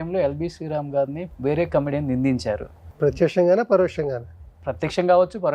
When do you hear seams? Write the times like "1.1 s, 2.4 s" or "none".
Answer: 1.2 s, 2.9 s